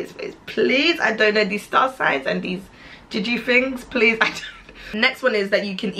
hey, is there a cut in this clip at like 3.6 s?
no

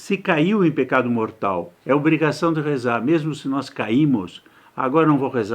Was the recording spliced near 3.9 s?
no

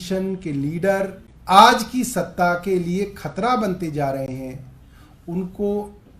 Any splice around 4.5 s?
no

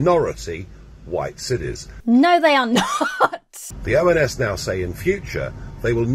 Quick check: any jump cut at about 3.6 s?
yes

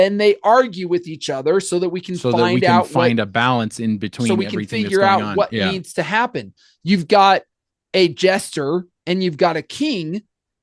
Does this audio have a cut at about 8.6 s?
no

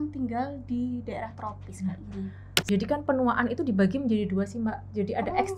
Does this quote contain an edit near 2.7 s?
yes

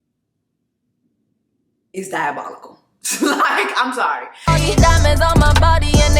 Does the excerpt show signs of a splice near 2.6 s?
no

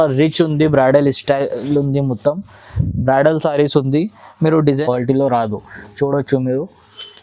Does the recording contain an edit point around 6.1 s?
no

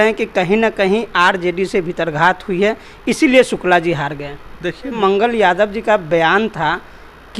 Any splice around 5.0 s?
yes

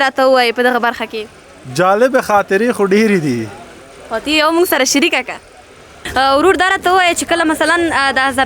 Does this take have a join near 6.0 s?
yes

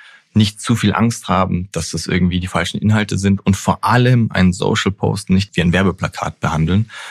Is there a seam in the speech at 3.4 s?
no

